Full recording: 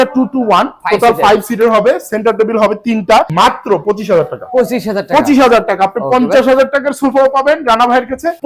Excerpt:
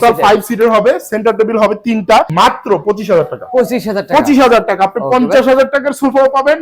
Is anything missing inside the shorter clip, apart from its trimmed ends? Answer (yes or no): no